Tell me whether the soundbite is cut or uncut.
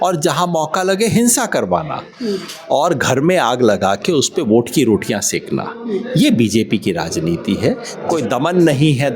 cut